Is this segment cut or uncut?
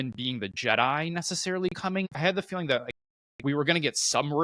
cut